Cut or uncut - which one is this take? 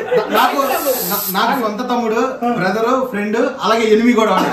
uncut